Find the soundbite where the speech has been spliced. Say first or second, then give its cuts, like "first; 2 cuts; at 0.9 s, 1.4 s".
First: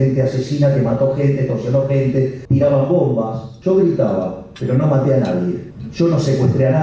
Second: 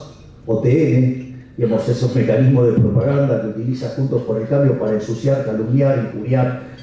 first; 3 cuts; at 2.4 s, 3.5 s, 5.7 s